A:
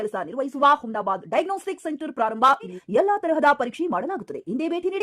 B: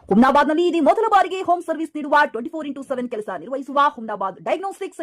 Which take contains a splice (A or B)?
A